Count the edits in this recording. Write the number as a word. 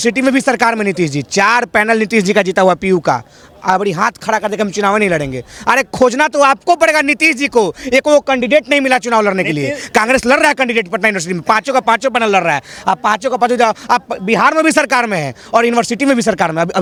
zero